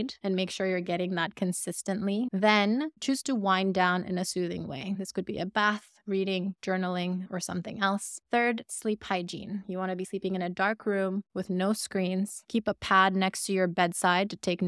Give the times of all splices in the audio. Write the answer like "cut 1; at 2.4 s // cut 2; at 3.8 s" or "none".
cut 1; at 2.3 s // cut 2; at 8.1 s